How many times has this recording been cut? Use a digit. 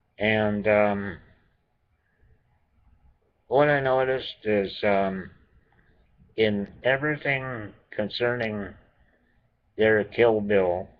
0